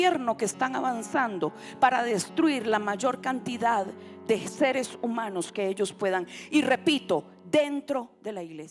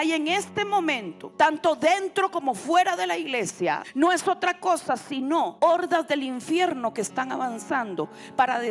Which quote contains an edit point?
second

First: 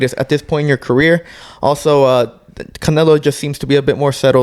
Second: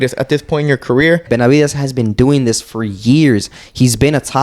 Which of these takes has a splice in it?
second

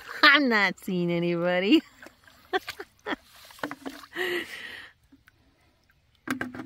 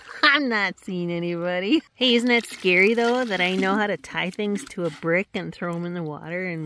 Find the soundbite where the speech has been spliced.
second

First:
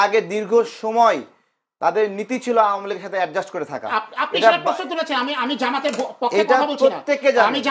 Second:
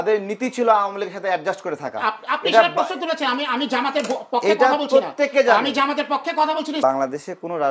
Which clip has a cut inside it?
second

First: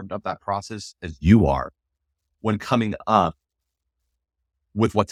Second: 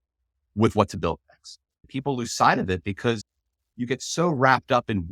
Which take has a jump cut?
second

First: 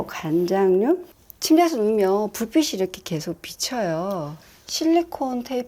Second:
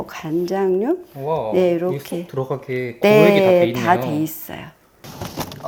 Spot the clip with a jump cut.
first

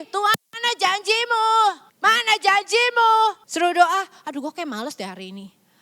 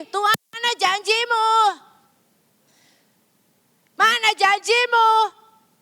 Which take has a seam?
first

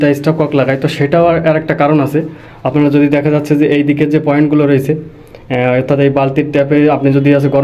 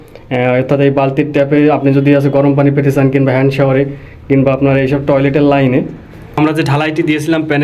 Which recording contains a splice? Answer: second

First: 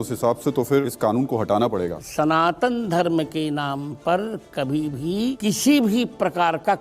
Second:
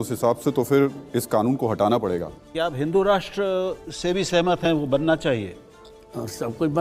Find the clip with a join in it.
first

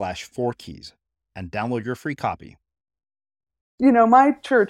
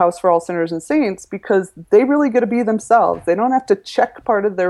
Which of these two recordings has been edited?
first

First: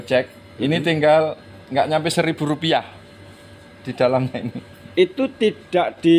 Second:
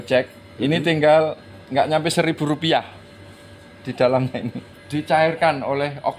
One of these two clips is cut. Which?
second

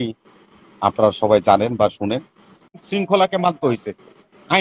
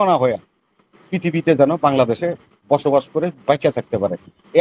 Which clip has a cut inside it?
first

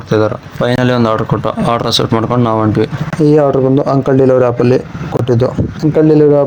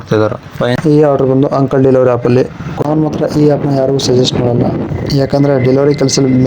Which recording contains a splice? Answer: second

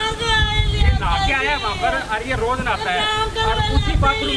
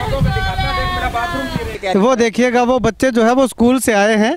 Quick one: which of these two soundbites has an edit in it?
second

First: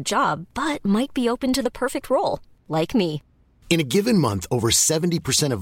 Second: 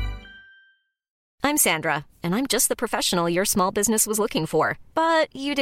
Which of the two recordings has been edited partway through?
second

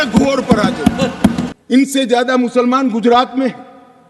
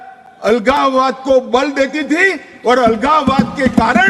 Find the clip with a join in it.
first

